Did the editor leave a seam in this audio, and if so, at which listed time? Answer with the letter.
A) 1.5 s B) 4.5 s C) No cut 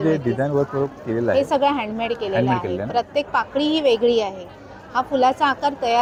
C